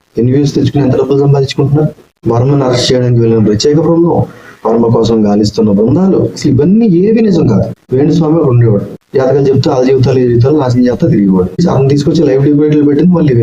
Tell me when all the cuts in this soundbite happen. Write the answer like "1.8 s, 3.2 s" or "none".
2.1 s, 7.8 s

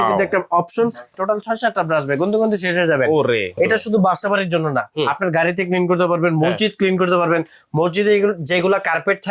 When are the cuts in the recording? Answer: 1.2 s, 3.6 s

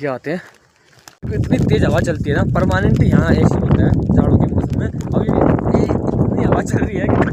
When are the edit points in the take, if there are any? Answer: none

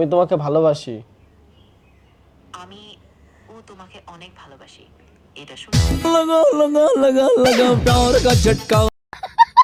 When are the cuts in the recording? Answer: none

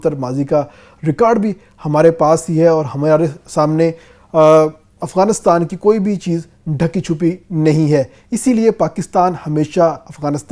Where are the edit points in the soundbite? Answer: none

